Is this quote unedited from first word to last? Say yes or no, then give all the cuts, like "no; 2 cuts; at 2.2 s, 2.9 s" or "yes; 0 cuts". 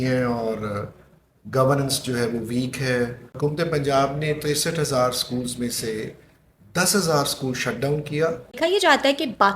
no; 2 cuts; at 3.3 s, 8.6 s